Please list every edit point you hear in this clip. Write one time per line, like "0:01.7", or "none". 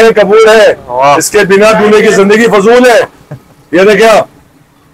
none